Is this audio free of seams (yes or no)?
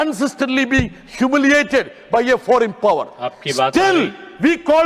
yes